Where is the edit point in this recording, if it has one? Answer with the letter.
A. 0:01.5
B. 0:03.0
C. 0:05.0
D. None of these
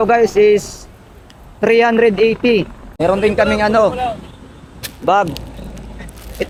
D